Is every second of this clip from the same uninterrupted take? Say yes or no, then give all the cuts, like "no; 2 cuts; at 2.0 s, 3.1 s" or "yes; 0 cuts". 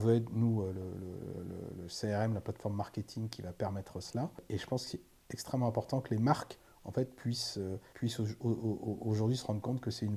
no; 2 cuts; at 4.4 s, 7.9 s